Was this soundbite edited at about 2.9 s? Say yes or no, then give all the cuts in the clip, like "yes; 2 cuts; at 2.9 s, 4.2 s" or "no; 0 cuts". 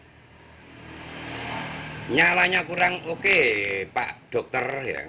no; 1 cut; at 4.2 s